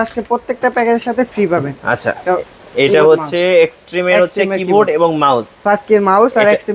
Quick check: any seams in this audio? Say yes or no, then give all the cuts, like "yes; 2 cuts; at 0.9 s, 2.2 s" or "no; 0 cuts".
no; 0 cuts